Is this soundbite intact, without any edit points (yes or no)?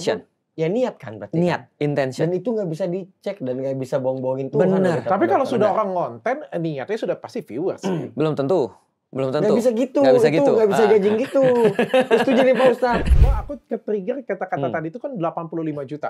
no